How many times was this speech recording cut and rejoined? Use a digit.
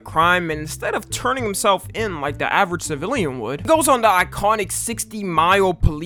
0